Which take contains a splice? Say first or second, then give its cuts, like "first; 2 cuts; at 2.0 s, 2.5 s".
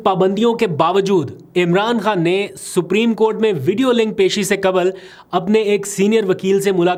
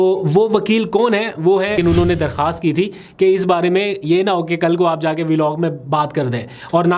second; 1 cut; at 1.8 s